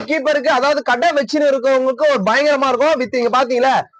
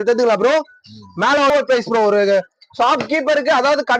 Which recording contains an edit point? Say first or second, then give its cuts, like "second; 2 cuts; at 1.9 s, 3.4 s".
second; 1 cut; at 1.5 s